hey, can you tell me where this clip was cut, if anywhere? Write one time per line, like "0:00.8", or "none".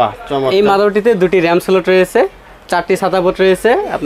none